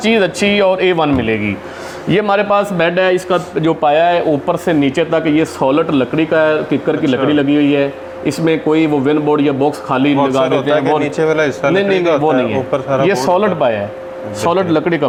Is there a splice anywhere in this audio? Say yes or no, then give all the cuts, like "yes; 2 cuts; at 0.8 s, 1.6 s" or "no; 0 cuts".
no; 0 cuts